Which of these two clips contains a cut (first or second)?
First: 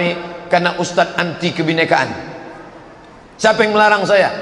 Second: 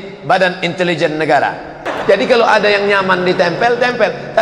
second